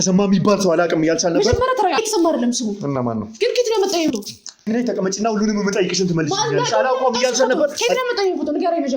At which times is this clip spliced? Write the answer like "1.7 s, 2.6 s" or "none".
4.7 s